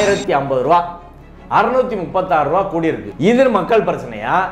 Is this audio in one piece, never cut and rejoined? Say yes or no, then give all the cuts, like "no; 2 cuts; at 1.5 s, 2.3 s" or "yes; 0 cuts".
yes; 0 cuts